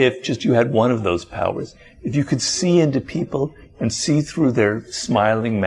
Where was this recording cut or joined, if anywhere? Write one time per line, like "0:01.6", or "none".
none